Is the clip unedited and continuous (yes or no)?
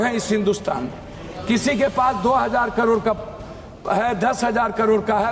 yes